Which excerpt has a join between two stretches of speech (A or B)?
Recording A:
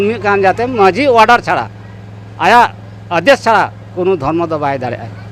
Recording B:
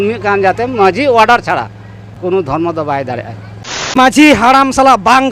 B